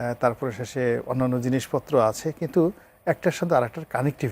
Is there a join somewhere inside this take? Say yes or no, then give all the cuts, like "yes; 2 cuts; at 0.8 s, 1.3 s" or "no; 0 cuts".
no; 0 cuts